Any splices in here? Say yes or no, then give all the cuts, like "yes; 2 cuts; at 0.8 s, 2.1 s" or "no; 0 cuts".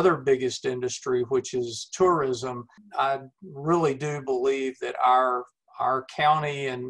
yes; 1 cut; at 2.8 s